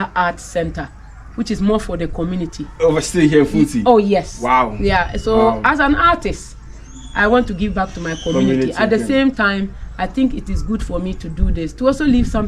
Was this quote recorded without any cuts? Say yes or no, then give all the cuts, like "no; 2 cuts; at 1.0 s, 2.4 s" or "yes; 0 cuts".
yes; 0 cuts